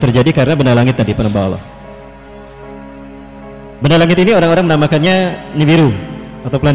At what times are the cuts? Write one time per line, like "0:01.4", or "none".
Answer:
none